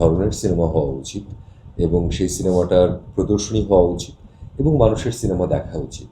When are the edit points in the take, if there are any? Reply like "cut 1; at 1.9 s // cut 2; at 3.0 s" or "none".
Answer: none